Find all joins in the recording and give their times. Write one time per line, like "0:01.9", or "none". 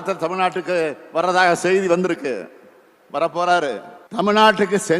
0:03.9